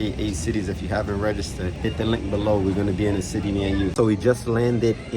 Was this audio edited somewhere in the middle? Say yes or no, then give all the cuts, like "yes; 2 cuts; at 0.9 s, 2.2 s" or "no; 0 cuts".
yes; 2 cuts; at 1.5 s, 3.9 s